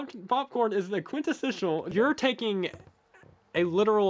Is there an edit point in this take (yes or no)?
yes